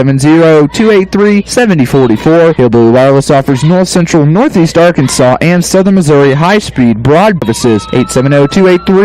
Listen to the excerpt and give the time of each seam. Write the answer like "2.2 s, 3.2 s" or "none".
7.4 s